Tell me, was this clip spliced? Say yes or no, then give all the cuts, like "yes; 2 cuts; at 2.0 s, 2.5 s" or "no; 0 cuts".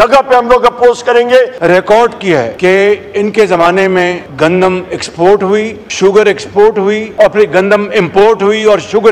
yes; 5 cuts; at 1.6 s, 2.5 s, 4.2 s, 5.8 s, 7.1 s